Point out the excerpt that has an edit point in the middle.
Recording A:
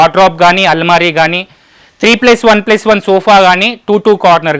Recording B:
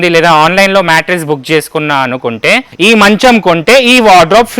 B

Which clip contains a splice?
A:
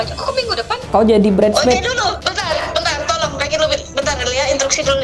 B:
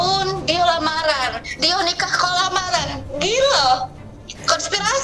A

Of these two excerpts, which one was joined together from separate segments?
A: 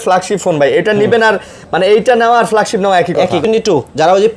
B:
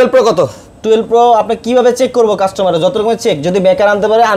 A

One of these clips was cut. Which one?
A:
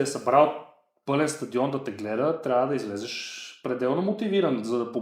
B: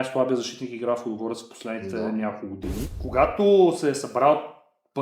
B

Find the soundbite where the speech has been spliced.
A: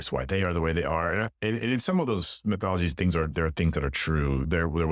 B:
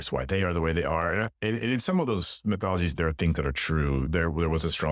B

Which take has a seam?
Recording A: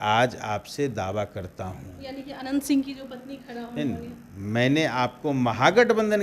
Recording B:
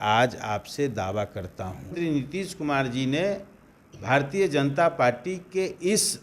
B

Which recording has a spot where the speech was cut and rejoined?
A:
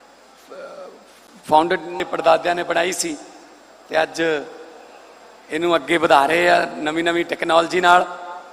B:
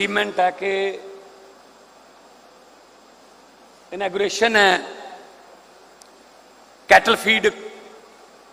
A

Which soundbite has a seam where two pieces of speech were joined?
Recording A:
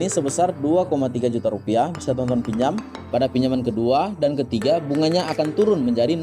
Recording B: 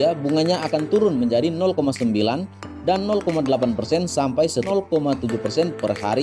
A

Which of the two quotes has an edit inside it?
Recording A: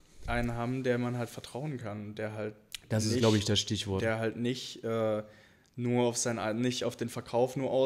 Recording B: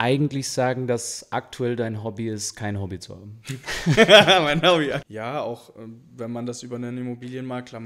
B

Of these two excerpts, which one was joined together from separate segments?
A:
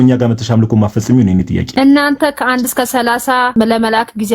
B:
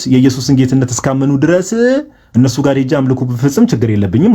A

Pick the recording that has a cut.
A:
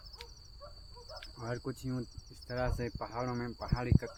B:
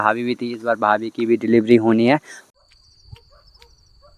B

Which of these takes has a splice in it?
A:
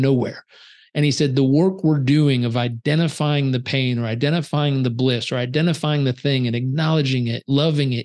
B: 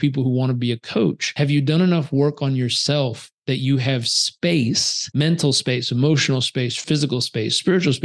B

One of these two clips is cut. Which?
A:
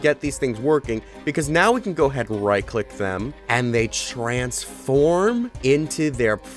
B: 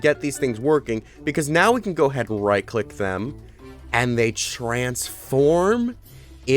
A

